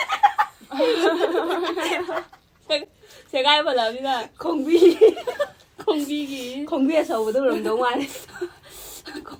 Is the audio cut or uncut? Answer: uncut